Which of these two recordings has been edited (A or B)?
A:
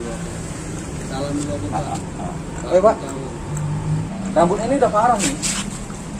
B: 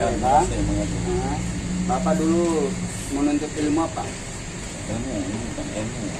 A